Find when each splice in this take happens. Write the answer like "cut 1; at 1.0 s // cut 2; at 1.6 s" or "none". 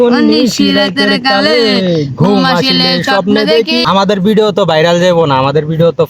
cut 1; at 3.8 s